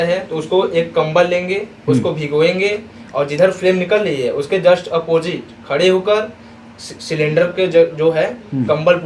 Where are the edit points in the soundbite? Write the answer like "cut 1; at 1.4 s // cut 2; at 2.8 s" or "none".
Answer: none